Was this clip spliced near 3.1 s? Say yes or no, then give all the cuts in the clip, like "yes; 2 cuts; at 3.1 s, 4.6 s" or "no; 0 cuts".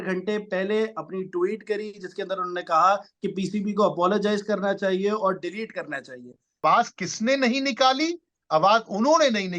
no; 1 cut; at 6.6 s